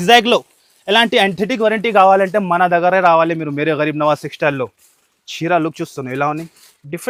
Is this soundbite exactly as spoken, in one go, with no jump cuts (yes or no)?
yes